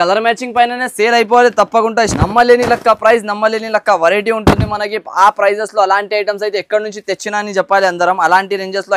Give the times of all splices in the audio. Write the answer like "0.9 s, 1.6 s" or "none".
2.1 s